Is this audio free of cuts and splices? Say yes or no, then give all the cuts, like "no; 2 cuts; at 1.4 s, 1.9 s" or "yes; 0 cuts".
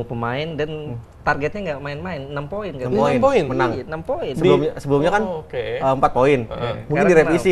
yes; 0 cuts